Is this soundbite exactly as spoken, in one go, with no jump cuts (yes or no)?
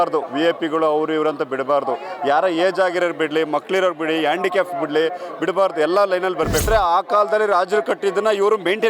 no